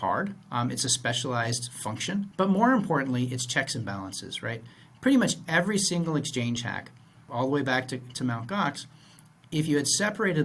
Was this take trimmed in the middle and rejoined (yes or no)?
yes